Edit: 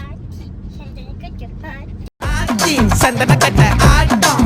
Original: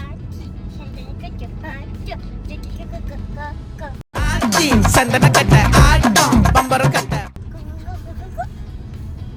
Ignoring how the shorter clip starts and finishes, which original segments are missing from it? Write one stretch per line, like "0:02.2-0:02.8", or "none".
0:02.1-0:04.0